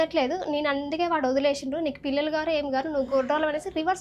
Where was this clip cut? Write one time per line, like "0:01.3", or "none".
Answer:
none